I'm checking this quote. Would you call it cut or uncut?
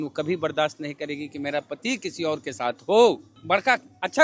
cut